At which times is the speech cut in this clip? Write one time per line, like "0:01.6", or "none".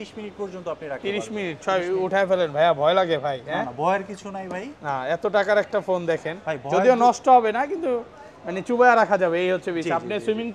none